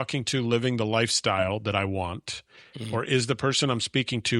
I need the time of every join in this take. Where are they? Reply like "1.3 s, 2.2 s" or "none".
none